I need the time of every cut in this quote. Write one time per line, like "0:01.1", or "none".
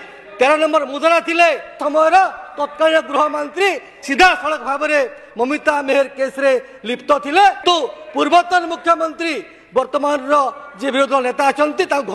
0:01.8
0:07.6